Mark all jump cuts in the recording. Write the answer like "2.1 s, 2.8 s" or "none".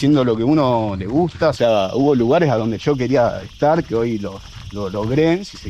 1.6 s